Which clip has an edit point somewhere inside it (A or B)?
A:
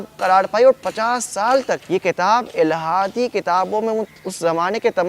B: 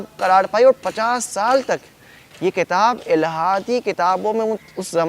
A